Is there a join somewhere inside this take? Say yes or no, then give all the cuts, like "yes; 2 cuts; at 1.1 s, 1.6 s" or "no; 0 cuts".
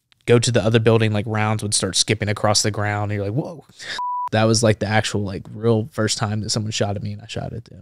yes; 1 cut; at 4.2 s